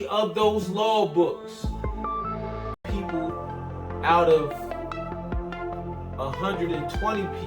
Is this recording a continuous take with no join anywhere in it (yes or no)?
no